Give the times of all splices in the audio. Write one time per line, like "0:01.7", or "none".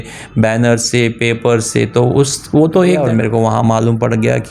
0:03.0